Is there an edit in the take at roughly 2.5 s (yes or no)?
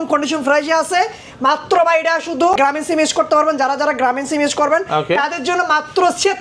yes